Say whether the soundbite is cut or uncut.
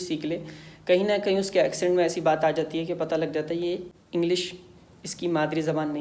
cut